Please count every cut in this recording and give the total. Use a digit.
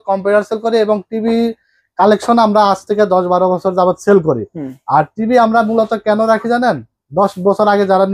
0